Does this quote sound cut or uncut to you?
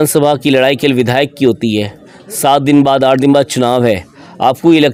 uncut